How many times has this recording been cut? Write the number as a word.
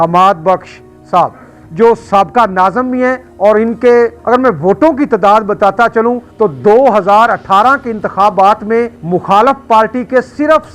four